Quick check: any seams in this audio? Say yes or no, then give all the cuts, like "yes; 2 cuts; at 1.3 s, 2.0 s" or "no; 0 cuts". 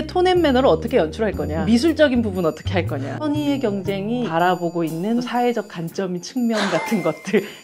yes; 4 cuts; at 1.5 s, 3.1 s, 4.3 s, 5.3 s